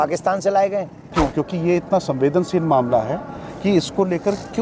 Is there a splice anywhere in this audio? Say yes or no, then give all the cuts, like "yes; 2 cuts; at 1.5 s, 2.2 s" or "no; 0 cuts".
yes; 1 cut; at 1.1 s